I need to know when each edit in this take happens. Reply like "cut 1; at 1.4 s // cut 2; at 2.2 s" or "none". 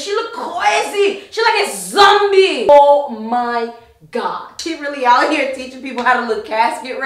cut 1; at 2.7 s // cut 2; at 4.7 s